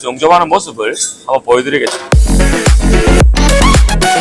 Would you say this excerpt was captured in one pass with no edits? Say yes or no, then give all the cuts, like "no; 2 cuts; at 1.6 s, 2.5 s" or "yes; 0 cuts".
no; 1 cut; at 2.0 s